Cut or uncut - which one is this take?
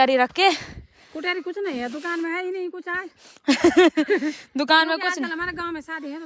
uncut